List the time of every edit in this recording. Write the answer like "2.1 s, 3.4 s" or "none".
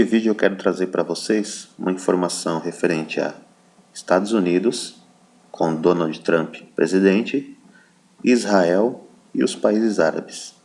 5.0 s

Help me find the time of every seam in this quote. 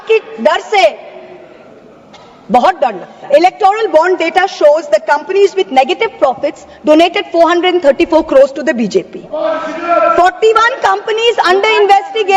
3.1 s

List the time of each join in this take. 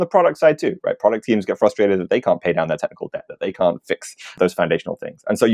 4.4 s

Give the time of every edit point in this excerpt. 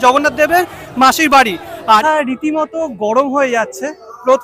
2.0 s

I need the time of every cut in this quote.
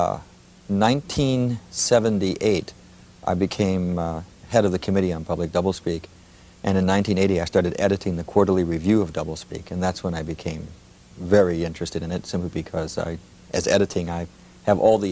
1.7 s

